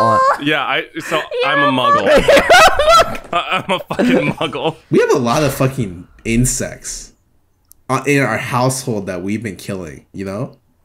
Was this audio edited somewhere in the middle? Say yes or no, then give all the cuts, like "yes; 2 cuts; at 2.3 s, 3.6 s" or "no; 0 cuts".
yes; 1 cut; at 4.8 s